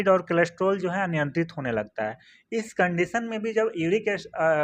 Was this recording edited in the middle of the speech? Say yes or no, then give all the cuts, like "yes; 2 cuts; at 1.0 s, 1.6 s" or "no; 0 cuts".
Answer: no; 0 cuts